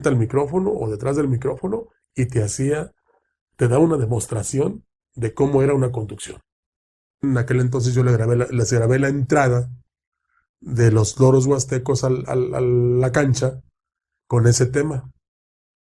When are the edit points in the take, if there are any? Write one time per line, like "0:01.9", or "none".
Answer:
0:07.2